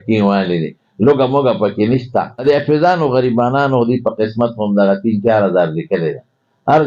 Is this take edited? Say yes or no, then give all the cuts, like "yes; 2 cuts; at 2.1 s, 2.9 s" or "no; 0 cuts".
yes; 1 cut; at 2.4 s